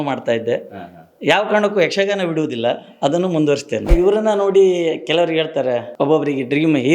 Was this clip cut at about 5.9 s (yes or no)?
yes